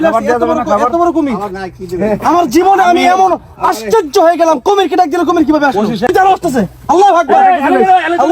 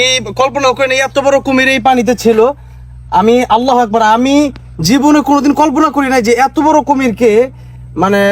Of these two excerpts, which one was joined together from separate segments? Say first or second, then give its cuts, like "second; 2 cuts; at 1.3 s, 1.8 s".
first; 1 cut; at 6.1 s